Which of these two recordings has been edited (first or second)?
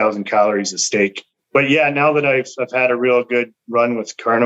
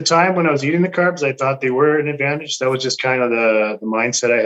first